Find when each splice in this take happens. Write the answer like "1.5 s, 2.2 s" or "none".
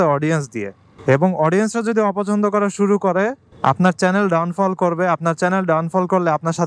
none